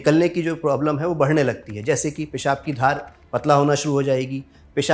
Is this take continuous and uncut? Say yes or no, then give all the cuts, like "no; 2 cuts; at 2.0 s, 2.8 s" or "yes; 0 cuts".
yes; 0 cuts